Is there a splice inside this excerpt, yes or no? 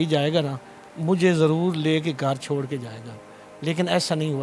no